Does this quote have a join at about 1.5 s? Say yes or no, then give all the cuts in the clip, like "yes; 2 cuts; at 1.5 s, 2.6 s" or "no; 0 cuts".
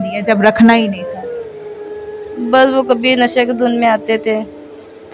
no; 0 cuts